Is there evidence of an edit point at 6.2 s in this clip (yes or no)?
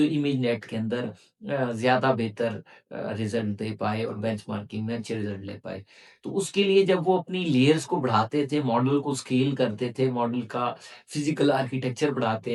no